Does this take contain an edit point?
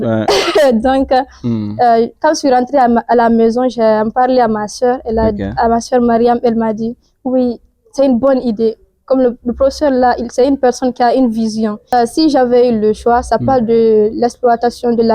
yes; 1 cut; at 11.9 s

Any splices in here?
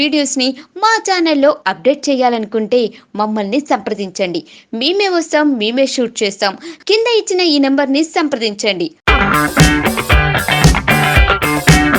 no; 0 cuts

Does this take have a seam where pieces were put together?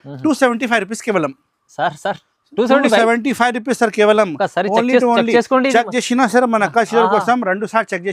no; 0 cuts

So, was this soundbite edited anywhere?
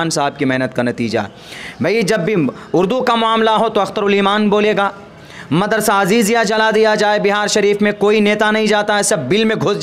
no; 0 cuts

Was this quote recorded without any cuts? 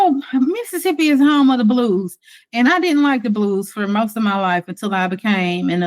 yes; 0 cuts

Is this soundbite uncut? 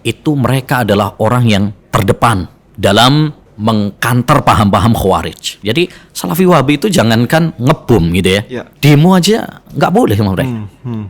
no; 5 cuts; at 1.8 s, 2.6 s, 3.4 s, 5.5 s, 8.6 s

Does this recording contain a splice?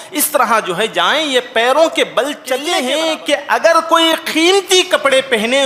yes; 1 cut; at 2.6 s

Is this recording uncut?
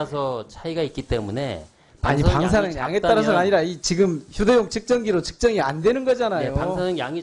yes; 0 cuts

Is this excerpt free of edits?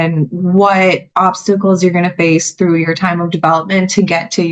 yes; 0 cuts

